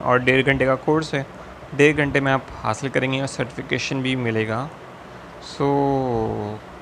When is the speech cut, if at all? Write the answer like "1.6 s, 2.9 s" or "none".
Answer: none